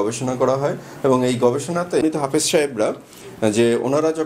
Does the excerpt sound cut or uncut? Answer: cut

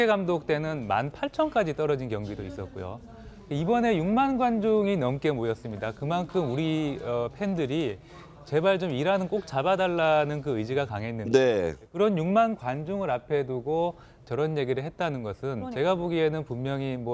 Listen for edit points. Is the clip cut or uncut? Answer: cut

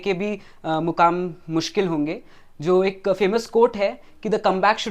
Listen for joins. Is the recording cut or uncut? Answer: uncut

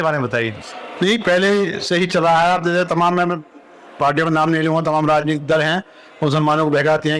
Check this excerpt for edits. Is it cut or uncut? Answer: uncut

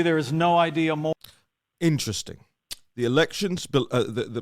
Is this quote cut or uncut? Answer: uncut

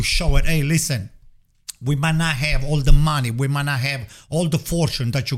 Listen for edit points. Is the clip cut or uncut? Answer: uncut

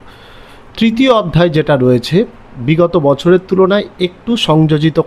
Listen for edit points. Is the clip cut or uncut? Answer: uncut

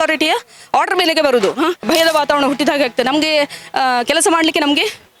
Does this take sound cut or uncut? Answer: cut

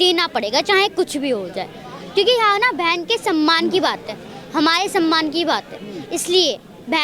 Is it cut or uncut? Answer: uncut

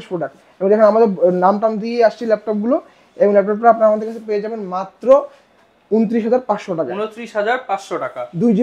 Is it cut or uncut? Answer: uncut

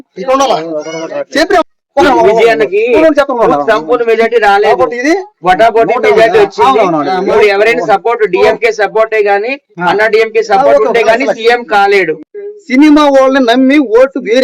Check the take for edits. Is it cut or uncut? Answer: cut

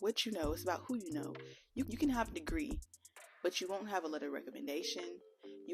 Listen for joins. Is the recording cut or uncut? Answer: uncut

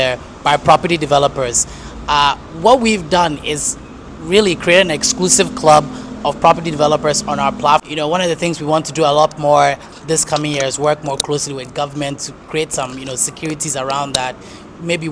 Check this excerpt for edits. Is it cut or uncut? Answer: cut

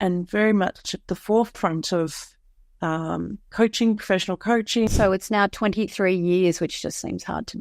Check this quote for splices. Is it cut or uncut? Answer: cut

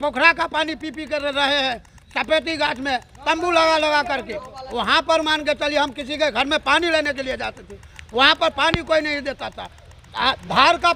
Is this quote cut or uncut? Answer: uncut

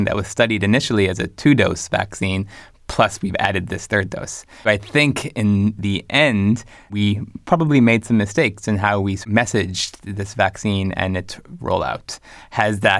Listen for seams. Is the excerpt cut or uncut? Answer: cut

